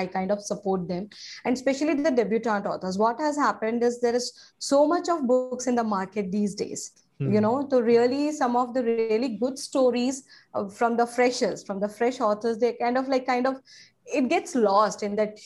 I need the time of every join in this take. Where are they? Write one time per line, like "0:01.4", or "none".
none